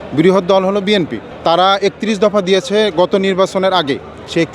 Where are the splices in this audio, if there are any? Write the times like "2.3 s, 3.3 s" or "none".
1.2 s